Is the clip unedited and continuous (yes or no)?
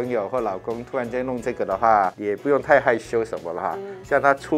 no